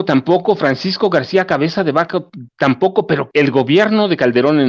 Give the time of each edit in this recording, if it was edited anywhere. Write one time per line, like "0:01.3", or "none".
0:03.2